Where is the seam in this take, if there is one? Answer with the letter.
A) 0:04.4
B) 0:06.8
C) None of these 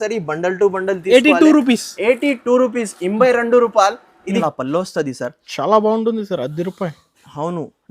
A